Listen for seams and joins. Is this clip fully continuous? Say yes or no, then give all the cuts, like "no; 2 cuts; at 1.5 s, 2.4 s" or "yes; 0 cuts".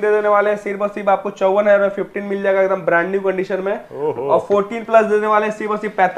yes; 0 cuts